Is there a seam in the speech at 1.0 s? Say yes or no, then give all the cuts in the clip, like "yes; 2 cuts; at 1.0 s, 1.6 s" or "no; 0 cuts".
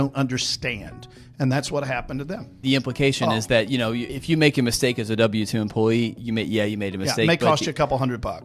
no; 3 cuts; at 2.5 s, 4.1 s, 6.2 s